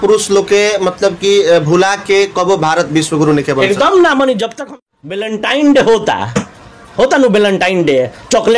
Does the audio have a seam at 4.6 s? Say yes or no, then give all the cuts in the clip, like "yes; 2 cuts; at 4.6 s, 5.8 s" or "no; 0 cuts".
yes; 1 cut; at 4.6 s